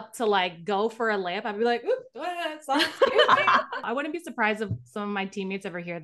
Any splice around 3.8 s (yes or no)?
yes